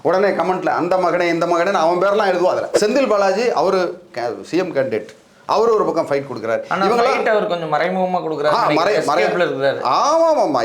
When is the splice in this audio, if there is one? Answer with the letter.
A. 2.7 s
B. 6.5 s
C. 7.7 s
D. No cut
A